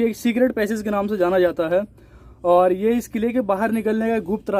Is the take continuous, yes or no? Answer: yes